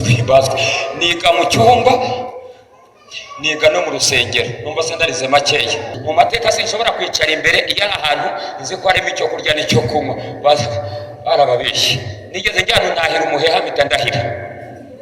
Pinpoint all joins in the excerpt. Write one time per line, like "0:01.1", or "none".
0:05.9